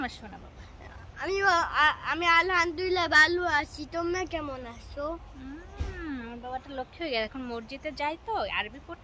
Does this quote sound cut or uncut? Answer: uncut